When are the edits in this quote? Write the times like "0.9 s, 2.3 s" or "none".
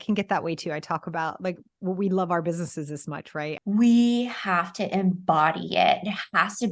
3.6 s